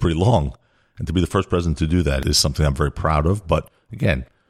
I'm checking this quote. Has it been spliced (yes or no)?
yes